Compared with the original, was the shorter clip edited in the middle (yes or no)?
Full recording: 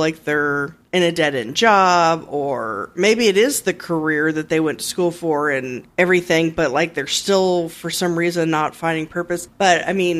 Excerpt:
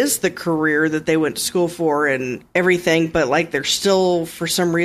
no